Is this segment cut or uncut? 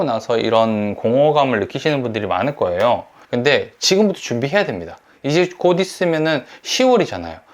cut